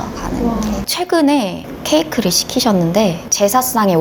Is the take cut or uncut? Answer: cut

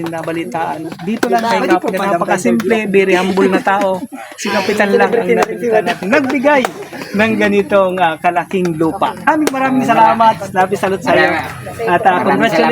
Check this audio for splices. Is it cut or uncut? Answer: cut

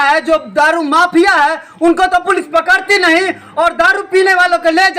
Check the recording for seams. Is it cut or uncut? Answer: uncut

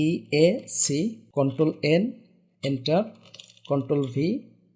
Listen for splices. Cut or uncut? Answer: cut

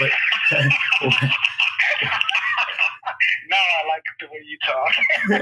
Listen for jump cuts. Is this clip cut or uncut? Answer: uncut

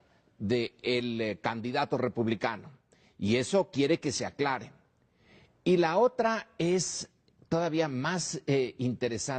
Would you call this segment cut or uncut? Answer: cut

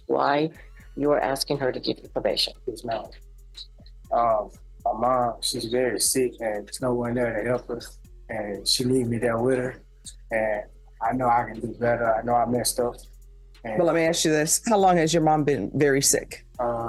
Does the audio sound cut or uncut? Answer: uncut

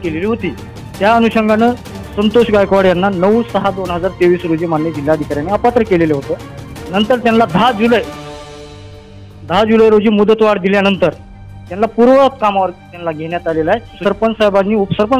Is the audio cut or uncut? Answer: cut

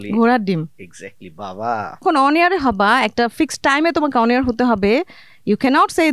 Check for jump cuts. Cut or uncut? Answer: cut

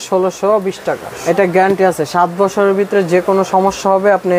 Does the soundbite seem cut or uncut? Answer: cut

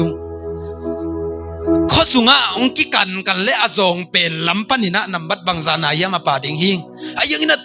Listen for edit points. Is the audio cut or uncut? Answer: uncut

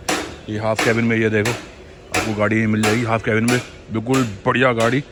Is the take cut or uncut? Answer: uncut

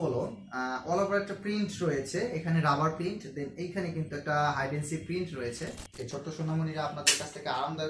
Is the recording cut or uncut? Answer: cut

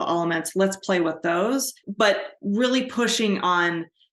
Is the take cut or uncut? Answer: cut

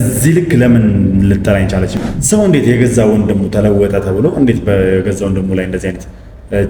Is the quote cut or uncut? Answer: cut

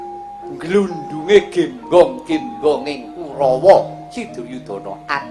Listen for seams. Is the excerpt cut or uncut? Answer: uncut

